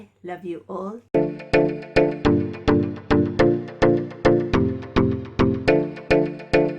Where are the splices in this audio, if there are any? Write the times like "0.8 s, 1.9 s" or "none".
1.1 s